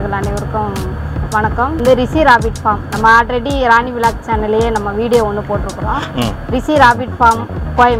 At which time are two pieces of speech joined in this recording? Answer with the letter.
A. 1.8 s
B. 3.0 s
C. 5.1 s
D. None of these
A